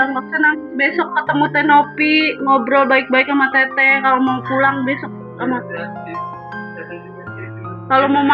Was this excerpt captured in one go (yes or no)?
yes